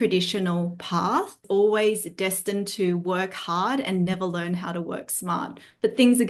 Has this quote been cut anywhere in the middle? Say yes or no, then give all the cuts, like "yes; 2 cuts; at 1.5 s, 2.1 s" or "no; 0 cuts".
yes; 1 cut; at 1.4 s